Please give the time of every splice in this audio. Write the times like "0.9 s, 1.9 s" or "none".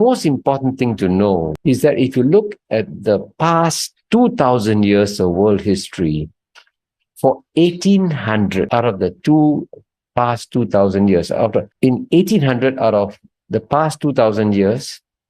1.5 s, 8.7 s, 11.7 s